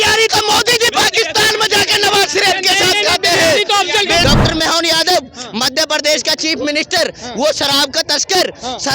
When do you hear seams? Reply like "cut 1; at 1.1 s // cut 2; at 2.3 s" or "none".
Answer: cut 1; at 4.2 s

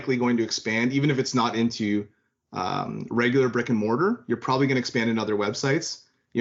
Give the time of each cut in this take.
none

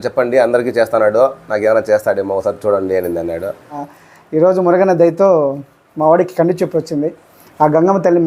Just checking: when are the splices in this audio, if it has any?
cut 1; at 3.9 s

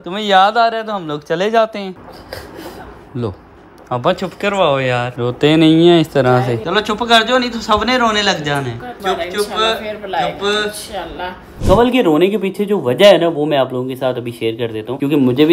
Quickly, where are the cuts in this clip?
cut 1; at 6.6 s // cut 2; at 8.9 s // cut 3; at 11.5 s

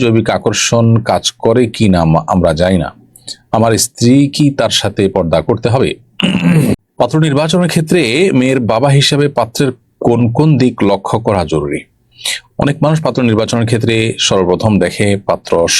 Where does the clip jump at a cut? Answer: cut 1; at 6.8 s

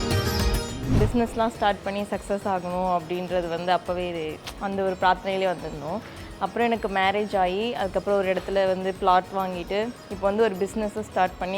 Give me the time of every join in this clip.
cut 1; at 0.9 s

